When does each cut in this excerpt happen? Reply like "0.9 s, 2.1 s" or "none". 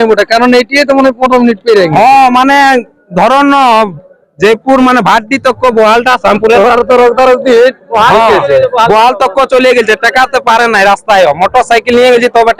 none